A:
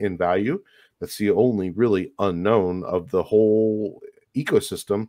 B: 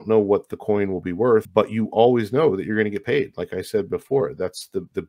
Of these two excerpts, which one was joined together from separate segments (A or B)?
B